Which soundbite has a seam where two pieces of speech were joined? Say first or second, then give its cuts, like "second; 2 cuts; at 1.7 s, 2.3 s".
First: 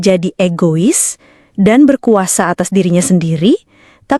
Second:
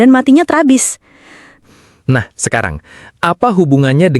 second; 1 cut; at 1.6 s